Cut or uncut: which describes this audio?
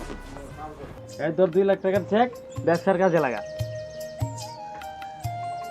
cut